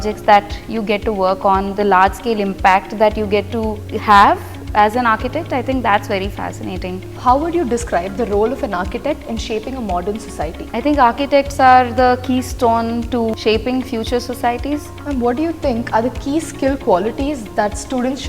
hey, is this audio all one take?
no; 5 cuts; at 3.9 s, 7.1 s, 10.6 s, 13.4 s, 14.9 s

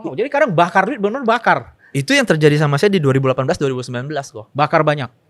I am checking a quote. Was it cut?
no; 0 cuts

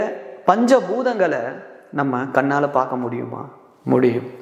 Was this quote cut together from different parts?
no; 0 cuts

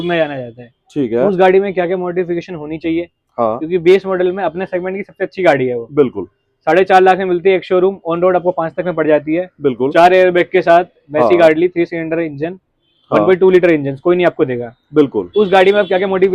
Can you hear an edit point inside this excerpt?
no; 0 cuts

